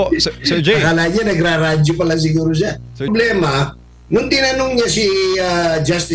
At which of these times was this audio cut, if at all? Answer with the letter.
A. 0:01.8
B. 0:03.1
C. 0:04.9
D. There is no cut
B